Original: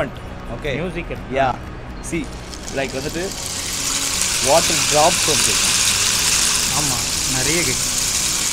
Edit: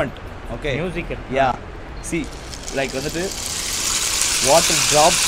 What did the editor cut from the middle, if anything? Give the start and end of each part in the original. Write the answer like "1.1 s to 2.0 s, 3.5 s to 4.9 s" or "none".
none